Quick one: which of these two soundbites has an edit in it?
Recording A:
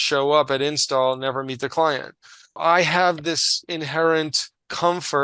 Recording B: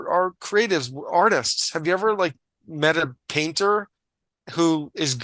A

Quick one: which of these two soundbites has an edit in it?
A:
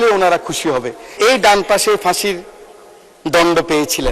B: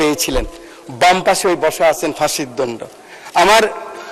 A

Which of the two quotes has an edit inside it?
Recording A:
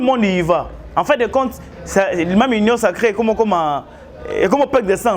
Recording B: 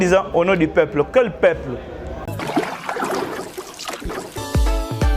B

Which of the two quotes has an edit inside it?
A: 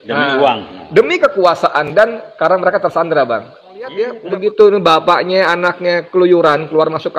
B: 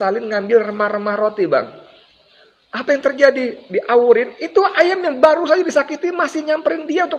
A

